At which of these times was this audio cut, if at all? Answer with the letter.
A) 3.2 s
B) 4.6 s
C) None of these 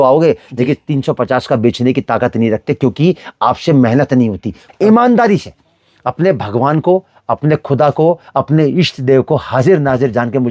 B